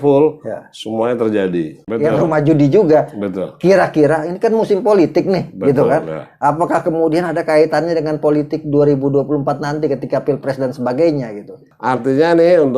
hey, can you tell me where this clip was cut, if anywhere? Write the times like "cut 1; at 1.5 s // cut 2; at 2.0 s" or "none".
cut 1; at 1.8 s // cut 2; at 11.7 s